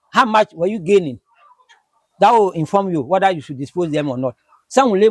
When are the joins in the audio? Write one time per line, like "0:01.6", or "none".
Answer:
none